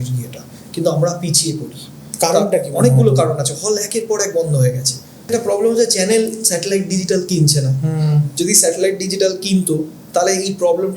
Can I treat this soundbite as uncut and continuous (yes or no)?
no